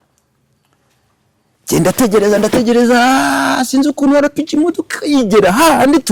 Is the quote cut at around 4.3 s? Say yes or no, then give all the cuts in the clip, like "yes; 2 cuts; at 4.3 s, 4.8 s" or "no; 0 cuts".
no; 0 cuts